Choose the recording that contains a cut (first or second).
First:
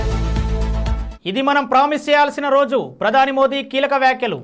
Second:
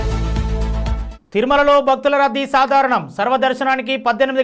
second